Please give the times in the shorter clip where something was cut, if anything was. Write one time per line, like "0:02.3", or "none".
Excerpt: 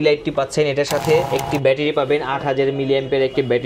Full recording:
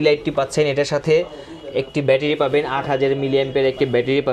0:01.3